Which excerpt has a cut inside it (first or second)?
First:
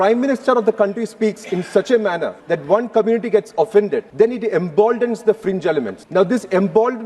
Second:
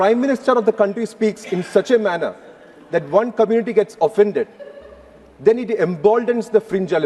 first